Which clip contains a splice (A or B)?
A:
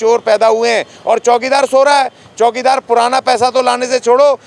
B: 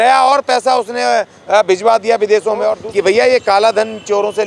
B